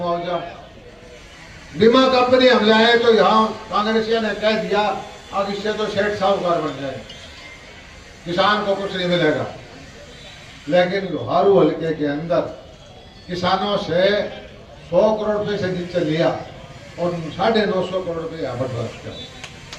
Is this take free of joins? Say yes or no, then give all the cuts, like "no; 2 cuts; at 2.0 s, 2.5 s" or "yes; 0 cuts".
yes; 0 cuts